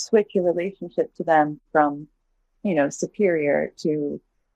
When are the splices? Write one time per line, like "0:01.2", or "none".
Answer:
none